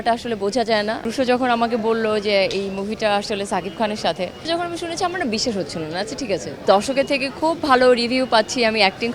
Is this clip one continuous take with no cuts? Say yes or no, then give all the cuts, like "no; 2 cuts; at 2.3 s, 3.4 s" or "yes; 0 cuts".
no; 3 cuts; at 1.1 s, 4.4 s, 6.6 s